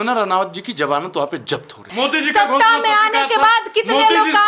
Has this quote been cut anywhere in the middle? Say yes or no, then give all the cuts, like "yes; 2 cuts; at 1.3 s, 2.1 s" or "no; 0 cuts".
yes; 1 cut; at 1.9 s